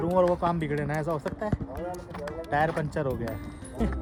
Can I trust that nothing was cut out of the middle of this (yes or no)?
yes